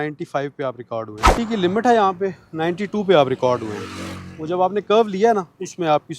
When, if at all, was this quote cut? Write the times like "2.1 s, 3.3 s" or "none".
1.3 s